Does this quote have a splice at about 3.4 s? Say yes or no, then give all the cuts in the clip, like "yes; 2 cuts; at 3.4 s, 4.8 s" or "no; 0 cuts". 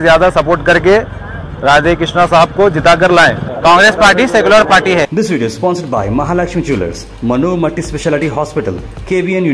yes; 2 cuts; at 3.4 s, 5.1 s